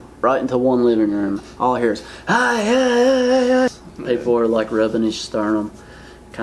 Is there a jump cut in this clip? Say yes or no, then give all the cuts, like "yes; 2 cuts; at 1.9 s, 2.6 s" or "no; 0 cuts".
yes; 1 cut; at 3.9 s